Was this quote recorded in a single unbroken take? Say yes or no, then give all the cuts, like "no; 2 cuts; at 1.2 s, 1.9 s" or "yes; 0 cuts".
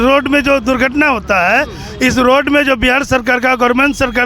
yes; 0 cuts